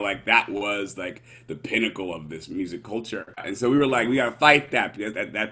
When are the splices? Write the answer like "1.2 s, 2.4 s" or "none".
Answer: 3.4 s